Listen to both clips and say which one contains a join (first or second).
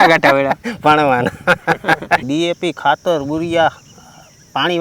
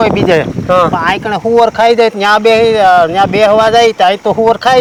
first